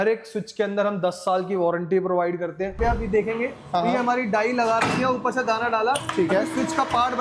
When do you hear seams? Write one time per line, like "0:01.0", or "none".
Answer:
0:02.8